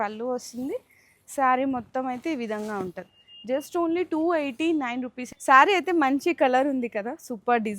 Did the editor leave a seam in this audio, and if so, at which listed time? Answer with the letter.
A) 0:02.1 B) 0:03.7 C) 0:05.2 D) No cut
C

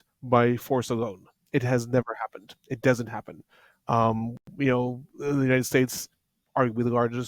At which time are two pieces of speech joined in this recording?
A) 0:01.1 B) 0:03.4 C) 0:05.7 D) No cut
D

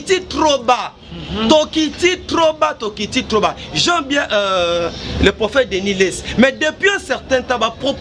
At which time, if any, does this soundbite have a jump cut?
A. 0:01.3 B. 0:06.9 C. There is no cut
C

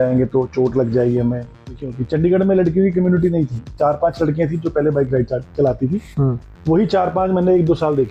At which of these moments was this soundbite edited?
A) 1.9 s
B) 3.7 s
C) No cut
A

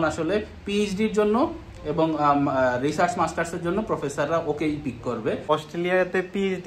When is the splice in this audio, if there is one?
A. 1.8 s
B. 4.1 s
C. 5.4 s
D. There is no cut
C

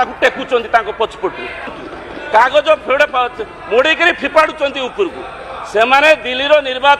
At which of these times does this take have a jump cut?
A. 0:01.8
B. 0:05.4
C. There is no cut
A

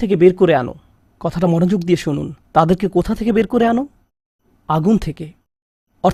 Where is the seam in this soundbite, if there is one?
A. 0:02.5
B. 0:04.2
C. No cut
C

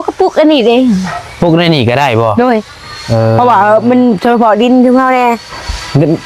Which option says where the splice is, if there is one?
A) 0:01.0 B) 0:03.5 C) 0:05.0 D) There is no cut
D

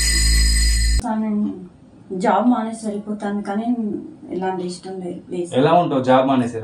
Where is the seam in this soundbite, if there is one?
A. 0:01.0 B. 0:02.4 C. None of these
A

